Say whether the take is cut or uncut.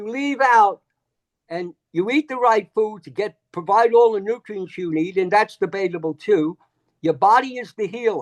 uncut